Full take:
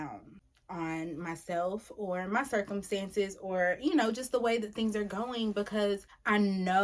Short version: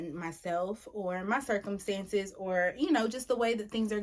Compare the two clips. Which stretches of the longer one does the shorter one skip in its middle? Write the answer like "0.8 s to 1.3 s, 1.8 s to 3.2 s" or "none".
none